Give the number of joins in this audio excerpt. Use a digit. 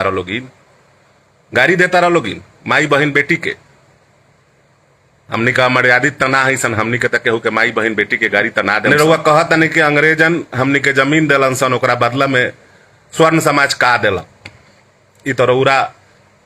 1